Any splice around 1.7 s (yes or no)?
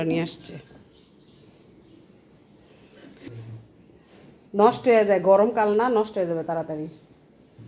no